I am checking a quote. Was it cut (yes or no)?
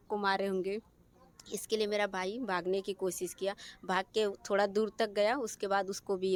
no